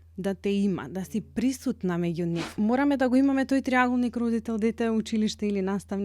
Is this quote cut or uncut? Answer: cut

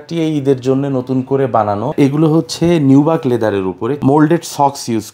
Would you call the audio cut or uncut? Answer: cut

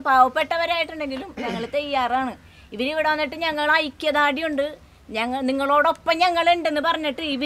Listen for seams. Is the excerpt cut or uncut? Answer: uncut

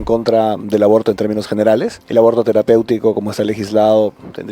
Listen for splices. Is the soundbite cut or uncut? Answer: cut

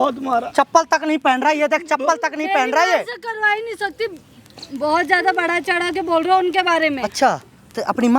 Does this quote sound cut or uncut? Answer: uncut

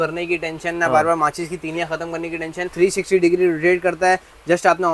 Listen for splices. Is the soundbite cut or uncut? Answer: cut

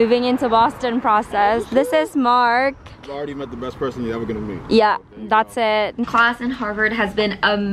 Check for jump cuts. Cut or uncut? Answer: cut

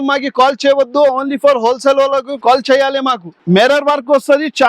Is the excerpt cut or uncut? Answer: cut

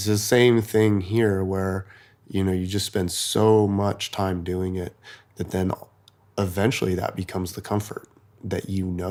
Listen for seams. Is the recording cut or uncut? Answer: uncut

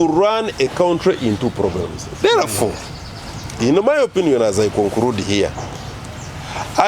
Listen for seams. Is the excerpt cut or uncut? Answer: uncut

